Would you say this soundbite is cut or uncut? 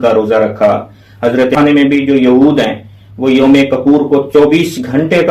cut